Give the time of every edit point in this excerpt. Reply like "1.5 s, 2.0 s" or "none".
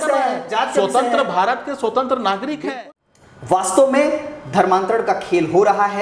3.1 s